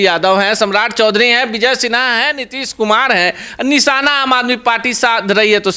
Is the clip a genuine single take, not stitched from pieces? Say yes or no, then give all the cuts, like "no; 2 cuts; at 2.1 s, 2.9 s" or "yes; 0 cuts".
yes; 0 cuts